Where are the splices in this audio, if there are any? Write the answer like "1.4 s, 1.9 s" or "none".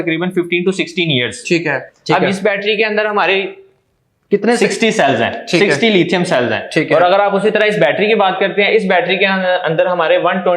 1.9 s